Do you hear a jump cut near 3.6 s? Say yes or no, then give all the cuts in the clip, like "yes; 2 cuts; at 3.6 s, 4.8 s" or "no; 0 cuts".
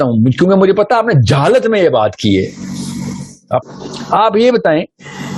yes; 1 cut; at 3.6 s